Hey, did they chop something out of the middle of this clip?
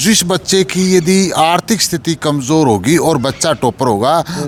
no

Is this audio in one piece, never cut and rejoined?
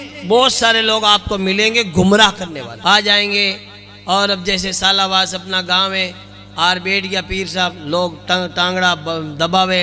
no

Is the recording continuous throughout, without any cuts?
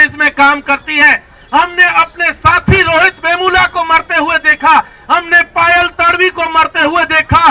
yes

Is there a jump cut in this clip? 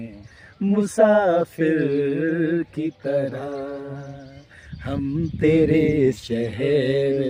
no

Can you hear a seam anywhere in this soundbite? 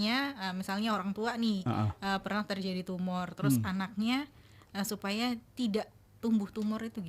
no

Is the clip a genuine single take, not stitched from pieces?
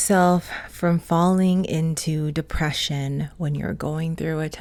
yes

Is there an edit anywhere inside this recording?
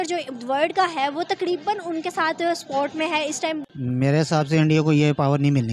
yes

